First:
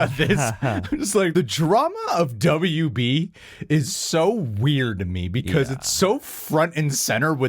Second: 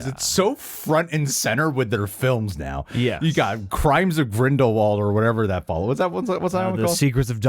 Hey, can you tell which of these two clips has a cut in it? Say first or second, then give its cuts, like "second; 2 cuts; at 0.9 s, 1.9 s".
first; 1 cut; at 1.3 s